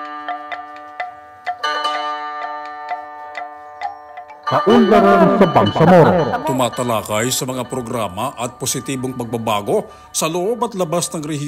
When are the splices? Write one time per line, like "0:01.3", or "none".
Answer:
0:04.5